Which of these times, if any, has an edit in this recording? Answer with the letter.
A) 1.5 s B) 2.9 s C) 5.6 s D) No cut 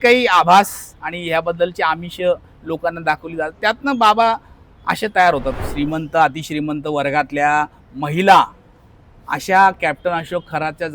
C